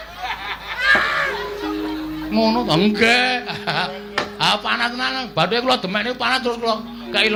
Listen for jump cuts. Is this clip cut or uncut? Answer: uncut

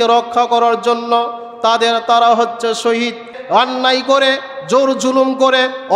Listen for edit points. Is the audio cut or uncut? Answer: cut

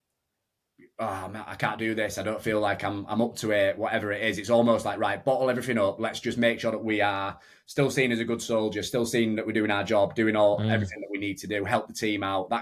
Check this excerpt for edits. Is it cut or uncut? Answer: uncut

